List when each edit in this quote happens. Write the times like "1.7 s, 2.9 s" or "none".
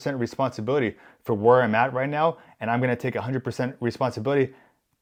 none